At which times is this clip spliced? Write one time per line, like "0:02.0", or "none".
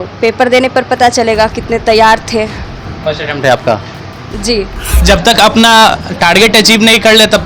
0:04.9